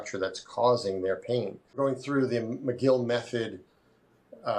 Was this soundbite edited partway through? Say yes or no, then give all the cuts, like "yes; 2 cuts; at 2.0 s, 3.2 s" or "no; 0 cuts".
yes; 1 cut; at 1.8 s